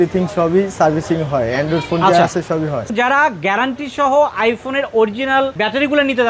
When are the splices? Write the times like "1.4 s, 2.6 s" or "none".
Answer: 2.9 s